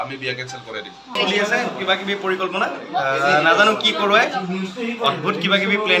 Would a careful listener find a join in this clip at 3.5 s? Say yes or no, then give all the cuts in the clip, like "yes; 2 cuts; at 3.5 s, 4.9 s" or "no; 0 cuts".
no; 1 cut; at 1.2 s